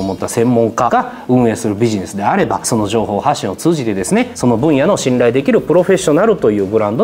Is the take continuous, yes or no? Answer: yes